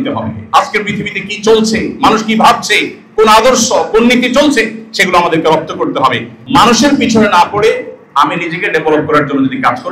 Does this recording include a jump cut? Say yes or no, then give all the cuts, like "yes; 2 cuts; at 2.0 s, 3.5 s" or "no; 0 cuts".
yes; 1 cut; at 6.3 s